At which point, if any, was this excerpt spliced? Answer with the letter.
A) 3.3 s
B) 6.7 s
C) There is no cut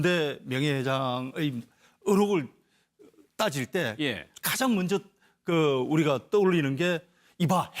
B